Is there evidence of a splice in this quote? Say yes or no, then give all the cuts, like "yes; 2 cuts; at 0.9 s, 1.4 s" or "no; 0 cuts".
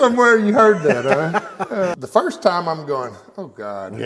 yes; 1 cut; at 1.9 s